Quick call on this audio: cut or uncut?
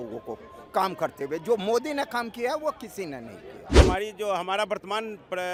uncut